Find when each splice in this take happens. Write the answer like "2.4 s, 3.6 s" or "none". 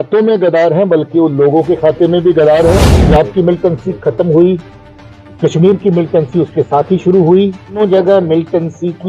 2.9 s, 7.8 s